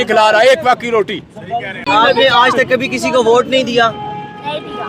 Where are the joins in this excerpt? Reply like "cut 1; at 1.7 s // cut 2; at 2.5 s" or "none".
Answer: cut 1; at 1.8 s